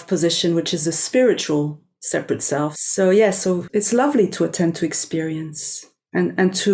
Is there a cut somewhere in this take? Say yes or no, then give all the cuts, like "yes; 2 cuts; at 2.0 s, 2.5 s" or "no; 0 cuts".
yes; 2 cuts; at 2.8 s, 3.6 s